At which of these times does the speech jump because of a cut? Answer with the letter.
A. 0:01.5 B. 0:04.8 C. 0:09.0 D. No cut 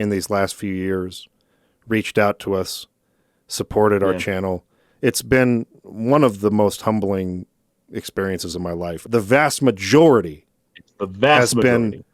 C